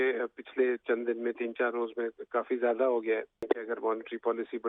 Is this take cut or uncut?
cut